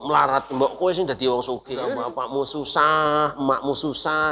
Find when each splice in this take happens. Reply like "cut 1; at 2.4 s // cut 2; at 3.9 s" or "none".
cut 1; at 2.0 s